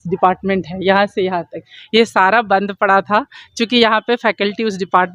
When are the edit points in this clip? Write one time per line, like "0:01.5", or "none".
none

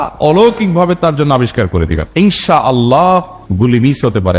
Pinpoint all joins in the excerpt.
0:02.1

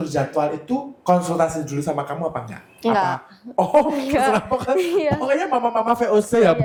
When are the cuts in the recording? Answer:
none

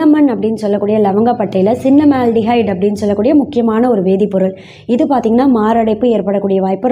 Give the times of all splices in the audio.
none

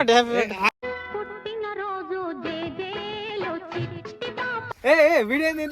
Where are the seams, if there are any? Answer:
0:04.7

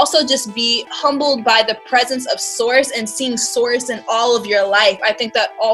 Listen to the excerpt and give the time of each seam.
none

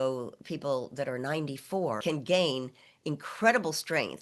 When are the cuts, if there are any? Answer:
0:02.0

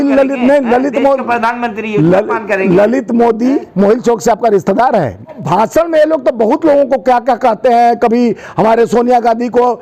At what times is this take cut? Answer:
0:05.4

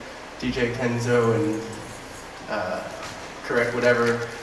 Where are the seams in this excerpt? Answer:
none

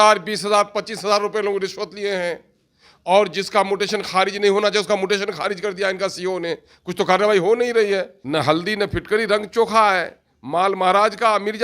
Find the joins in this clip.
0:08.2

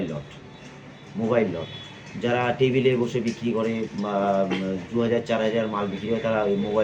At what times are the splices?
none

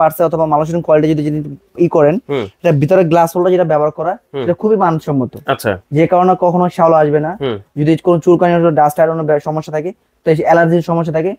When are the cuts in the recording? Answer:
none

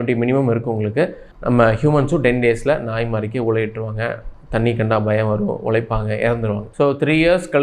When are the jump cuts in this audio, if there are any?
0:01.3
0:06.7

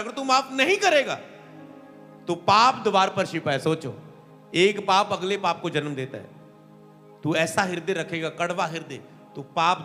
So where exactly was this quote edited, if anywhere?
none

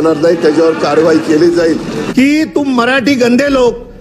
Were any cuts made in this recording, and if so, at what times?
0:02.0

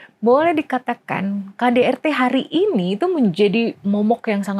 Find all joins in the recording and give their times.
none

